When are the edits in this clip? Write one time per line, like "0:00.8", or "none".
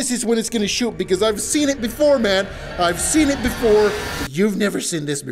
none